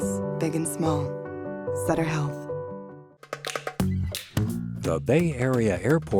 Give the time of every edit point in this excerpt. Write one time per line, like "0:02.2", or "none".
0:03.0